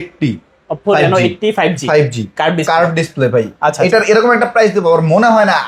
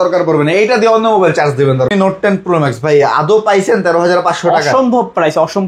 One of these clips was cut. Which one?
second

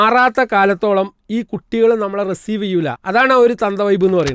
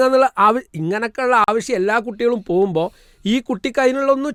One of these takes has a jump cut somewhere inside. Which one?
first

